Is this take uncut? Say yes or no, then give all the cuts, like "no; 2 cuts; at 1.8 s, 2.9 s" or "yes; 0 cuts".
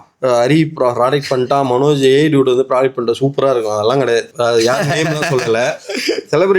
no; 1 cut; at 4.3 s